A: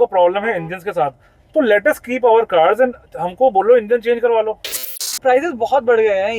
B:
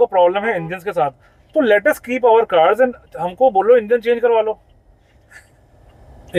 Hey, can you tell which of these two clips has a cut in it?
A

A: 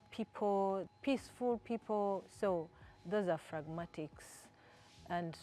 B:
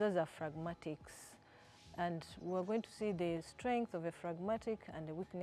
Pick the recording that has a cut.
A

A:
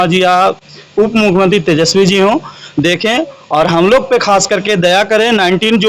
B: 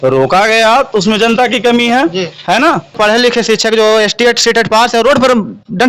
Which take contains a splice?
B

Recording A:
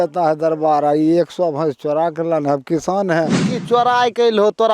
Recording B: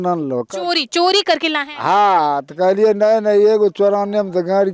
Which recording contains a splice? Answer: A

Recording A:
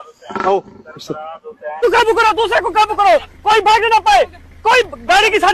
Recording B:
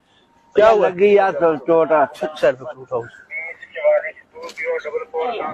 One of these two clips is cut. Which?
A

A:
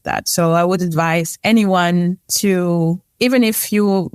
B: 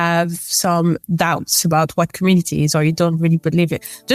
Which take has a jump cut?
A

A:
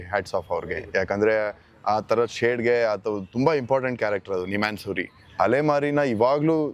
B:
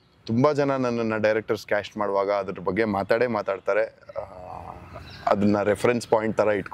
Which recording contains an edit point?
A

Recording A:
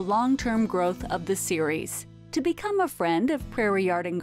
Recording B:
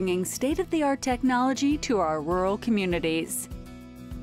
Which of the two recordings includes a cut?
B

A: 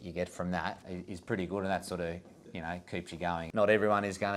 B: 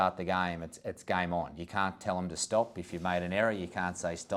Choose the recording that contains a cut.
A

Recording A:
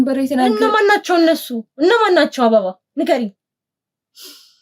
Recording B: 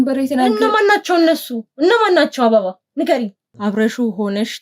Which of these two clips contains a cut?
B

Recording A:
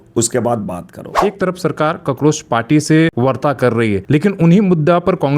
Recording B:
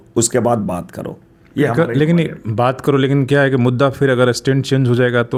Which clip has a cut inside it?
A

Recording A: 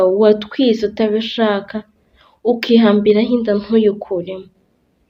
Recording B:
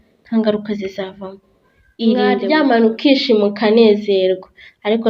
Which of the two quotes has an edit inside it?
B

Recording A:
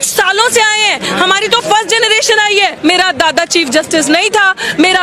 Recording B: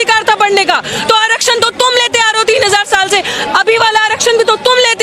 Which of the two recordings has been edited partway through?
A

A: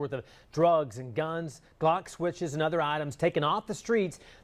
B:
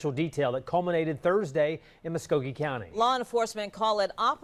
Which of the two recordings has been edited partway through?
A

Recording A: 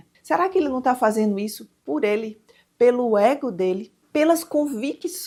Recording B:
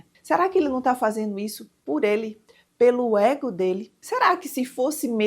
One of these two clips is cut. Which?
B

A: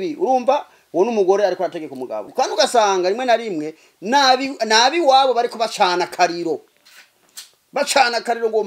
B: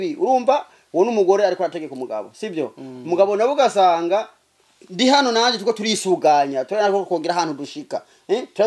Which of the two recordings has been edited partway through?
A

